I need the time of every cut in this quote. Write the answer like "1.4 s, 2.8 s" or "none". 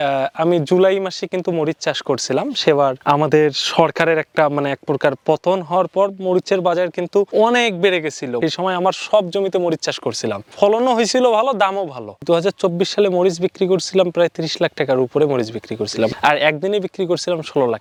none

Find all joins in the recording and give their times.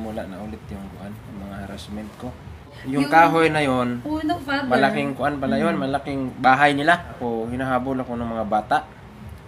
2.7 s, 7.1 s

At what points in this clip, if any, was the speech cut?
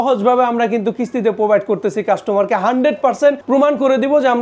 3.4 s

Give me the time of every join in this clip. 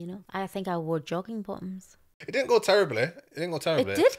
2.2 s

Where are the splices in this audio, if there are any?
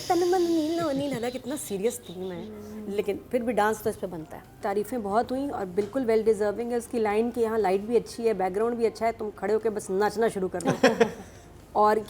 4.5 s

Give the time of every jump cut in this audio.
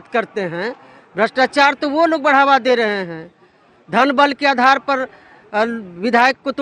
none

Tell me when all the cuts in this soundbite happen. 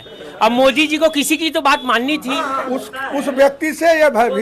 2.6 s

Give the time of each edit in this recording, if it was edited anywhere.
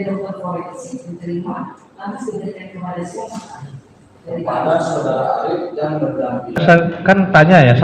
6.6 s

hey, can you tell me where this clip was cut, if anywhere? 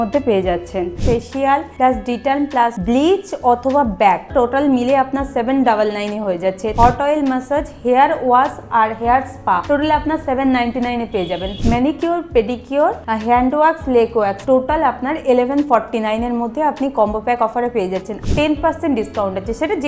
1.4 s, 2.7 s, 4.3 s, 6.6 s, 9.6 s, 11.5 s, 13.1 s, 14.4 s, 18.1 s

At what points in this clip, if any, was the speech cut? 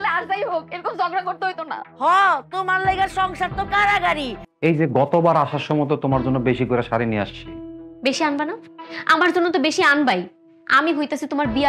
4.4 s

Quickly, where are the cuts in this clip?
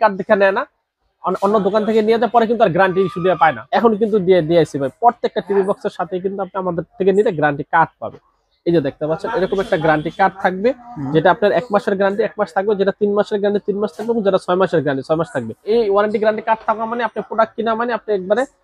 3.6 s, 15.7 s

